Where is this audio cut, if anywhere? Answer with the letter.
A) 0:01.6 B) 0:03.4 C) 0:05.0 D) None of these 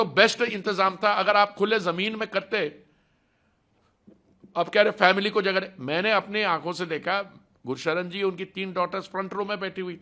D